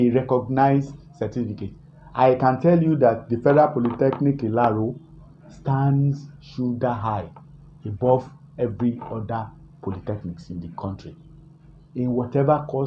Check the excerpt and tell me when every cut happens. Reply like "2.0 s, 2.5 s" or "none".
none